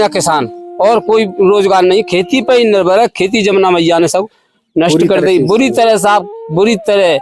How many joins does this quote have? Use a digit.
0